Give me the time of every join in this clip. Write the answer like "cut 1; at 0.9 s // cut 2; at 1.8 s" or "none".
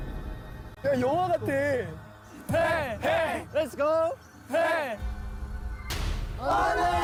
none

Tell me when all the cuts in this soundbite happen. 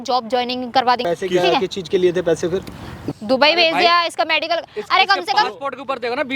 cut 1; at 1.0 s // cut 2; at 3.0 s

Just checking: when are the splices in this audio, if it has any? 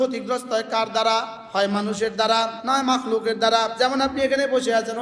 cut 1; at 1.4 s // cut 2; at 2.6 s // cut 3; at 3.7 s

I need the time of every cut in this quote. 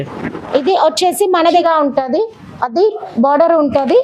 cut 1; at 1.5 s

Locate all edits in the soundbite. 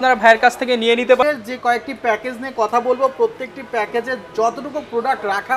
cut 1; at 1.2 s

